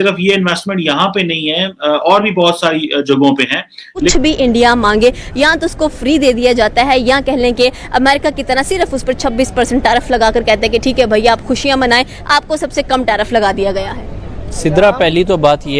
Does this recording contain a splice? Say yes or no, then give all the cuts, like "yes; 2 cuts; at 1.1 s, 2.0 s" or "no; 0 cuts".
yes; 1 cut; at 4.1 s